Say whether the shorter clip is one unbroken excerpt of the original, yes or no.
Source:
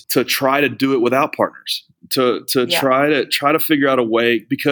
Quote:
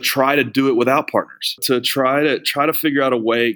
no